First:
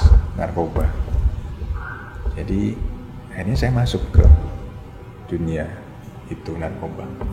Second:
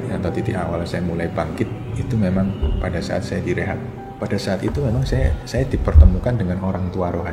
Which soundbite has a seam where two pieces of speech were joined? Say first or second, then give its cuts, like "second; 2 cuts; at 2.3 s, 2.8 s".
second; 1 cut; at 4.1 s